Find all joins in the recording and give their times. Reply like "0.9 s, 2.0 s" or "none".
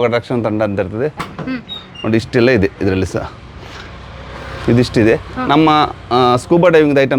1.2 s